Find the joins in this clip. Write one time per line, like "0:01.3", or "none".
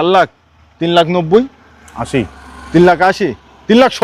none